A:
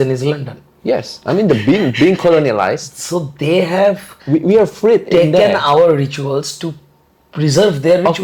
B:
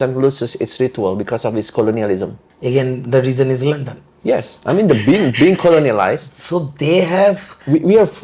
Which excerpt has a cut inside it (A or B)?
B